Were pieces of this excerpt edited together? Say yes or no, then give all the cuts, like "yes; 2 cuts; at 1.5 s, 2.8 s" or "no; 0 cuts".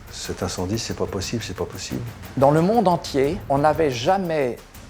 yes; 2 cuts; at 2.1 s, 3.4 s